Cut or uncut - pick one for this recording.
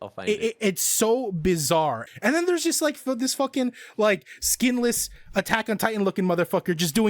cut